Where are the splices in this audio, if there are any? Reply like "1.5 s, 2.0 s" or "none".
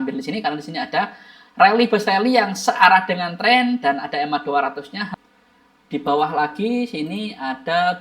5.1 s